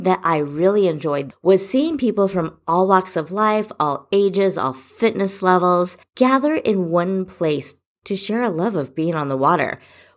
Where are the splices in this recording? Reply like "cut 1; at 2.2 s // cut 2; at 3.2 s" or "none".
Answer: cut 1; at 1.3 s // cut 2; at 6.0 s